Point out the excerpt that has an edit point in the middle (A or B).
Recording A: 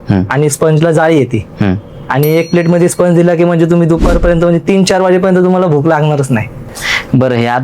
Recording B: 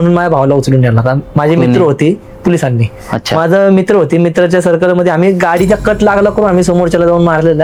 A